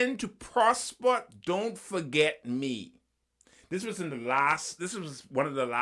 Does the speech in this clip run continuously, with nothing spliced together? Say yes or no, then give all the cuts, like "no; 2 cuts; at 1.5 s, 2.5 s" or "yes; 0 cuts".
yes; 0 cuts